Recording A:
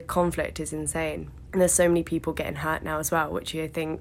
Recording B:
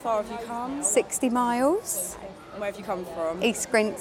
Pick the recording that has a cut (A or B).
A